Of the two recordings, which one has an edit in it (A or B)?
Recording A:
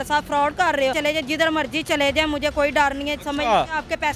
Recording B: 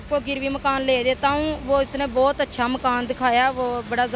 A